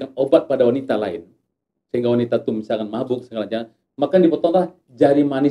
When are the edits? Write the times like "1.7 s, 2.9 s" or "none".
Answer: none